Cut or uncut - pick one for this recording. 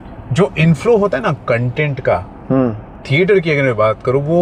uncut